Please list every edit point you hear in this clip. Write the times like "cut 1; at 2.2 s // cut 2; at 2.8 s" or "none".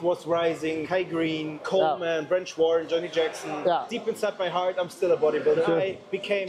cut 1; at 1.0 s // cut 2; at 5.6 s